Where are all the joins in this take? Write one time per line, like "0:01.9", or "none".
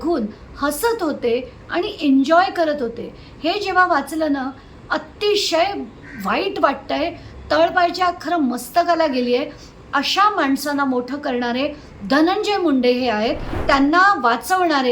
0:13.6